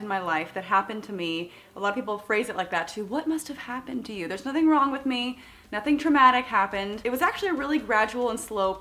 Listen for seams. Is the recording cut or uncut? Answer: uncut